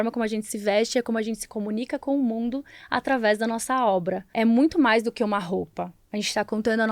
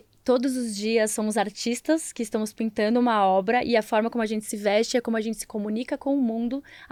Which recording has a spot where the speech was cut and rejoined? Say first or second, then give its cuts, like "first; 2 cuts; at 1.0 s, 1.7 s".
first; 1 cut; at 4.3 s